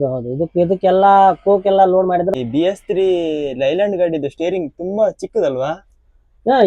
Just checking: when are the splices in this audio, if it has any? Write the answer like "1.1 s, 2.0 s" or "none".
2.3 s